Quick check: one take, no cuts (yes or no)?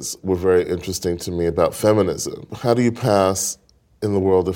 no